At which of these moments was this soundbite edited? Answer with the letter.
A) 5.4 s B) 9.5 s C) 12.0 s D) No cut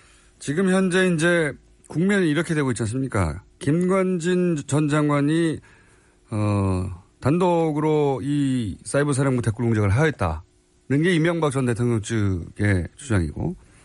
A